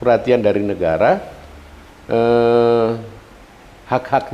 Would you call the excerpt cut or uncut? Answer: uncut